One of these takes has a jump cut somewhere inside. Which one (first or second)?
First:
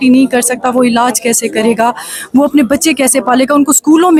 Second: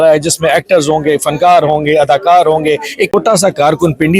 second